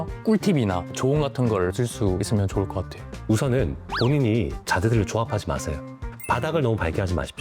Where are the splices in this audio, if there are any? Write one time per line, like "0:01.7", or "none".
0:06.1